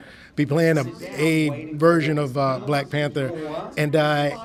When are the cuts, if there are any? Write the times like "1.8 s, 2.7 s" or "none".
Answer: none